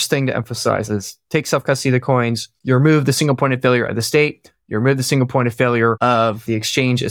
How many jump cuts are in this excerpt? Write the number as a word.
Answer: three